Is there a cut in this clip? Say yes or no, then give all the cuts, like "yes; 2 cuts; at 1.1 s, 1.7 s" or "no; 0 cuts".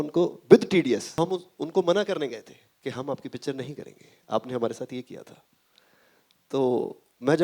yes; 1 cut; at 1.2 s